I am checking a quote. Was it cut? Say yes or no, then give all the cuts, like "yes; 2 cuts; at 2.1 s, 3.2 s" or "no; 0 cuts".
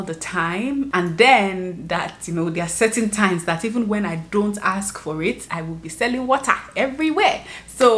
yes; 2 cuts; at 0.9 s, 5.4 s